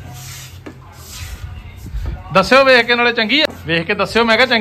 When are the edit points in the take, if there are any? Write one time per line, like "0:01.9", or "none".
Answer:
0:03.4